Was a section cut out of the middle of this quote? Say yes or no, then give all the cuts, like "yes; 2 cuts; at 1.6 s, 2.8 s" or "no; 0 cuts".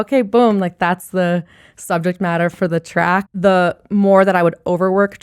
yes; 1 cut; at 3.3 s